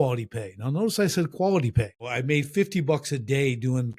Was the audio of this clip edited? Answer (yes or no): yes